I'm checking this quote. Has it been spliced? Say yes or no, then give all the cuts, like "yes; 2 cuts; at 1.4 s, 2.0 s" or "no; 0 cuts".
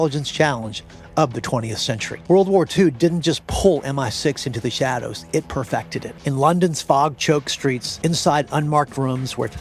yes; 3 cuts; at 2.1 s, 6.1 s, 7.9 s